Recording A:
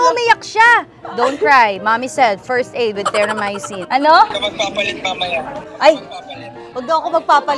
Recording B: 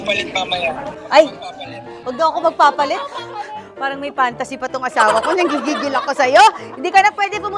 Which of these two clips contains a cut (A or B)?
A